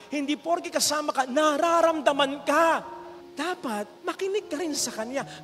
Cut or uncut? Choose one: uncut